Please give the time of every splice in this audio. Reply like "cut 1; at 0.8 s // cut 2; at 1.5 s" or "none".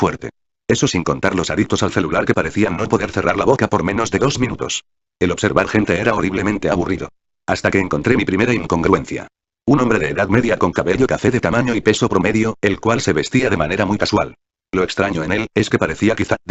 none